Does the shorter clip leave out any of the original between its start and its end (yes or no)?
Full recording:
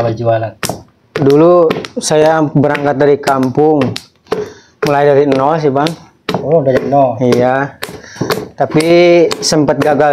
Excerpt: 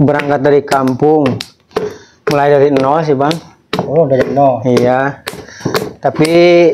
no